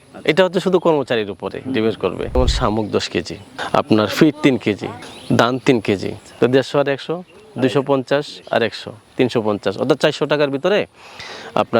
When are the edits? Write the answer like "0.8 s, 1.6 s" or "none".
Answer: 2.4 s, 6.2 s